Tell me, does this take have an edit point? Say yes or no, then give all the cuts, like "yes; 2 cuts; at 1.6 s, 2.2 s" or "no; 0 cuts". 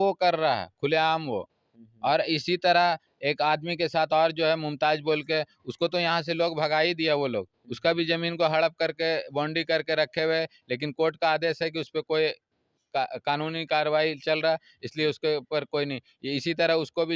no; 0 cuts